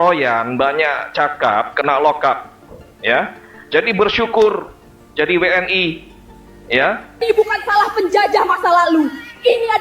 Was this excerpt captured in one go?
no; 1 cut; at 7.2 s

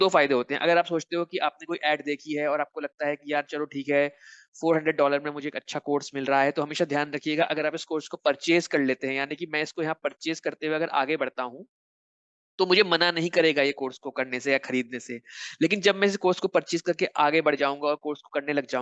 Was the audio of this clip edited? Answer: no; 0 cuts

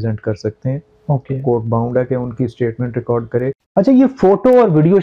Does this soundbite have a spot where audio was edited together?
yes; 1 cut; at 3.6 s

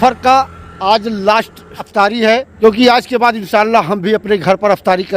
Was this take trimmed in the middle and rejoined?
yes; 1 cut; at 2.5 s

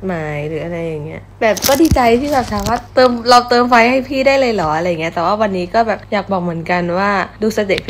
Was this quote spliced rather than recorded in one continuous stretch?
yes; 2 cuts; at 2.8 s, 6.0 s

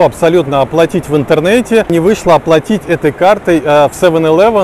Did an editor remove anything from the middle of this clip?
yes; 1 cut; at 1.9 s

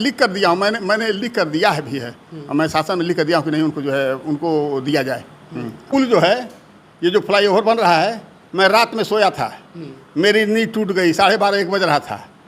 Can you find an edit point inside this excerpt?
yes; 1 cut; at 5.9 s

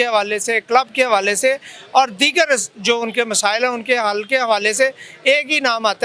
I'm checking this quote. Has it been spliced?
no; 0 cuts

